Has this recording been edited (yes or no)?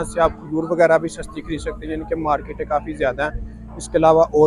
no